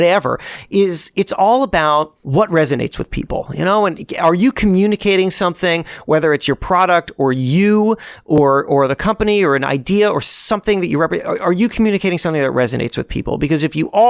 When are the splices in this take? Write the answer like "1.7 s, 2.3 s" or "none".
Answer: 2.2 s